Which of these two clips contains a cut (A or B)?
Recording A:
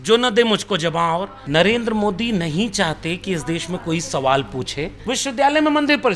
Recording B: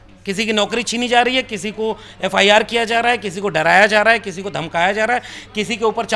A